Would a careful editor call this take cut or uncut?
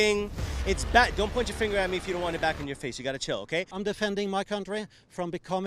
cut